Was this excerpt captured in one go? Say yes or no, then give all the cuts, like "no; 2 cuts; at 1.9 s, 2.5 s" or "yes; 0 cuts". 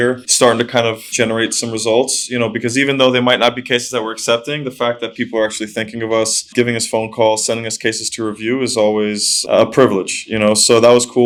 yes; 0 cuts